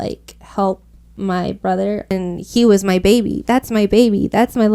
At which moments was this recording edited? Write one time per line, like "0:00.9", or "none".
0:02.2